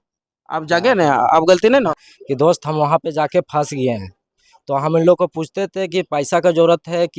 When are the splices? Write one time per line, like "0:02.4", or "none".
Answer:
0:02.0